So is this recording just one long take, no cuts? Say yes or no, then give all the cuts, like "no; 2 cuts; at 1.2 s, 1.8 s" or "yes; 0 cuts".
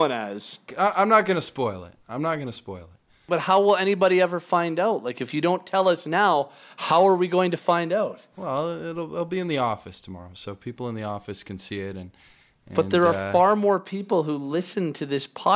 no; 1 cut; at 3.3 s